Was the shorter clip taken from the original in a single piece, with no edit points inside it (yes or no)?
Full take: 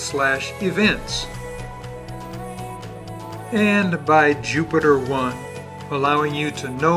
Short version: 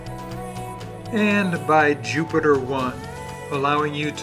no